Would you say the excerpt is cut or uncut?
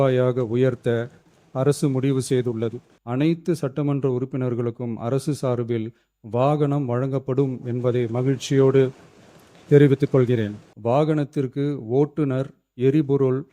cut